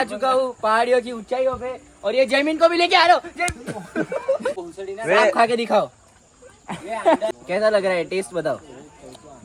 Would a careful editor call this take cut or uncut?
cut